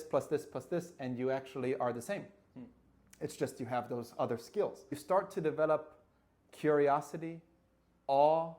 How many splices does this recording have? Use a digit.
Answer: 1